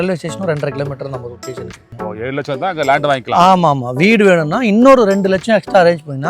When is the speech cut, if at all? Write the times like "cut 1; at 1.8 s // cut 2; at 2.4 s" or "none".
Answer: cut 1; at 1.9 s